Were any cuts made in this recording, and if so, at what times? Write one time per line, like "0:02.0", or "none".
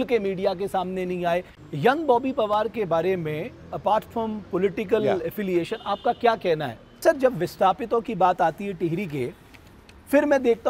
0:01.6
0:07.0